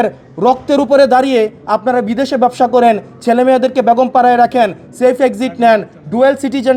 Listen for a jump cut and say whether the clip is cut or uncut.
uncut